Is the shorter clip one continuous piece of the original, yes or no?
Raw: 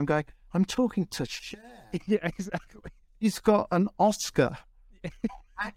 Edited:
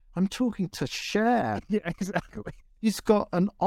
yes